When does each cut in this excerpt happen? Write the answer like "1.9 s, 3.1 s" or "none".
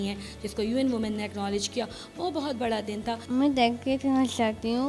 3.2 s